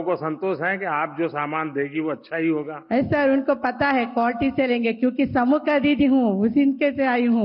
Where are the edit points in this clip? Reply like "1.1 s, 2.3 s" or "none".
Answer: none